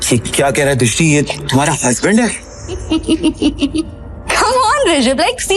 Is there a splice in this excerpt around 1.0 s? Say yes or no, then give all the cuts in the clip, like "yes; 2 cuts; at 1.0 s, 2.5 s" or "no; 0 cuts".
no; 1 cut; at 2.8 s